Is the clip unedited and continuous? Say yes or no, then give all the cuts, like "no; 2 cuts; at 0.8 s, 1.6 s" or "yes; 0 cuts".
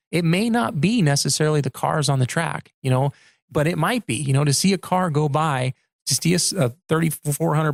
yes; 0 cuts